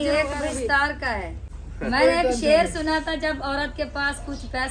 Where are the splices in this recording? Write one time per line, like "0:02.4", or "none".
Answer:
0:01.7